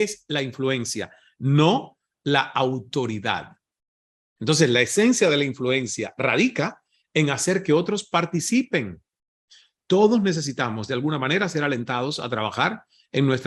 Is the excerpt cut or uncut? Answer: uncut